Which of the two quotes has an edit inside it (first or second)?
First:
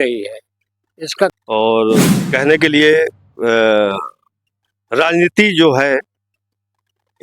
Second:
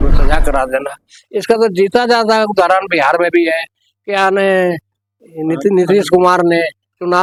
first